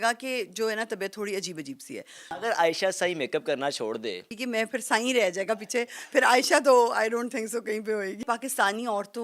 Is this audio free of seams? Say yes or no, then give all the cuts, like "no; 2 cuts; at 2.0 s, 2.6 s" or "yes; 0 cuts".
no; 3 cuts; at 2.2 s, 4.4 s, 8.2 s